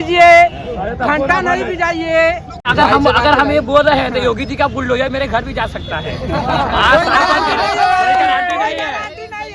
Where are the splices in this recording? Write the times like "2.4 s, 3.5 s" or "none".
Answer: 2.6 s